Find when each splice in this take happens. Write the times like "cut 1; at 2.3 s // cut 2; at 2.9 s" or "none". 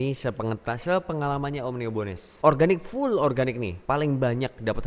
cut 1; at 2.3 s